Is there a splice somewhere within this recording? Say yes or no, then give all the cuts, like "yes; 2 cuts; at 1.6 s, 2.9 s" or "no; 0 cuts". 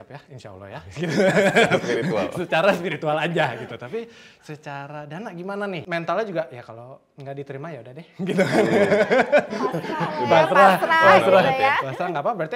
yes; 1 cut; at 5.8 s